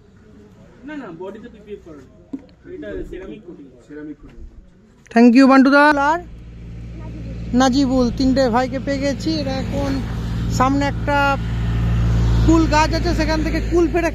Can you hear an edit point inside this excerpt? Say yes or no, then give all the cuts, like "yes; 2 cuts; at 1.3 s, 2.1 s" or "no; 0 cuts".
yes; 1 cut; at 5.9 s